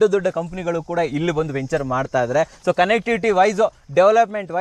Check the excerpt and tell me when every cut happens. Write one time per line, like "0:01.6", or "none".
none